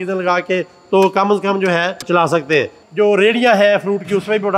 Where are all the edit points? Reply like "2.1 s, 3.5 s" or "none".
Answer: 2.1 s, 2.8 s